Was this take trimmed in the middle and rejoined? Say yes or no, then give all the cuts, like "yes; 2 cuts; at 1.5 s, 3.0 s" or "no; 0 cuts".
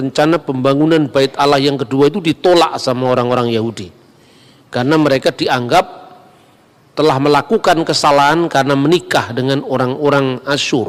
no; 0 cuts